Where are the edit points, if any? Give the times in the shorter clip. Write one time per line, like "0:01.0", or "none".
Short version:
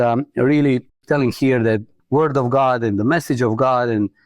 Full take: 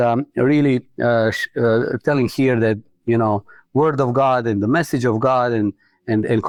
0:00.9
0:01.9